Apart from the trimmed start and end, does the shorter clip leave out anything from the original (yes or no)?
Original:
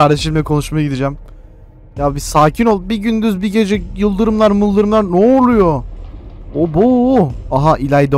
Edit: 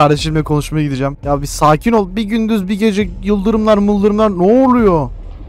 yes